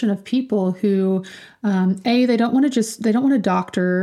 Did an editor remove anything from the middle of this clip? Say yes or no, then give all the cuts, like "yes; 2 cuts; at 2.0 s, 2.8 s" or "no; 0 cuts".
no; 0 cuts